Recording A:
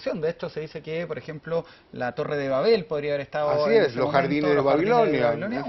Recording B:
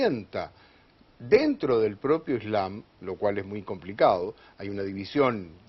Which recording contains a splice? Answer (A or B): B